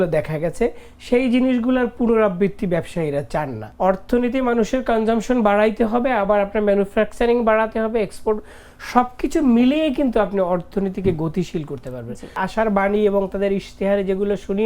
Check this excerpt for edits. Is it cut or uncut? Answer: cut